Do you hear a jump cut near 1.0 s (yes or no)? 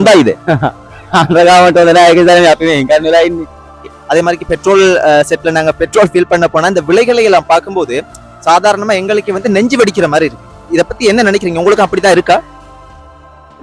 no